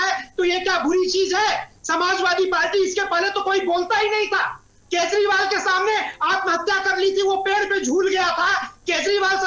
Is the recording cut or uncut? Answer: uncut